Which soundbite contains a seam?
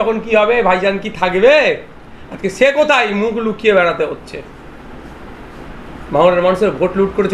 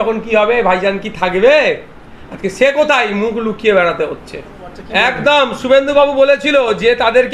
second; 1 cut; at 4.8 s

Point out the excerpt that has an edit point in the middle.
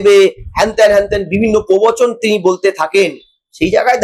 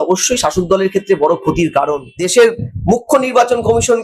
second; 1 cut; at 2.1 s

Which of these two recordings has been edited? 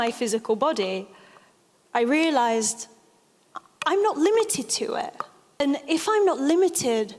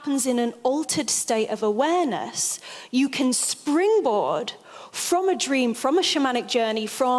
first; 1 cut; at 5.6 s

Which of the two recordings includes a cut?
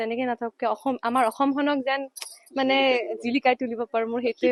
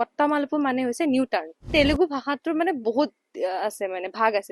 second; 1 cut; at 1.7 s

